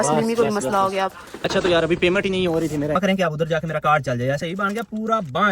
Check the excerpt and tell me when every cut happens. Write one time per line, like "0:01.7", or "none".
0:03.0
0:04.4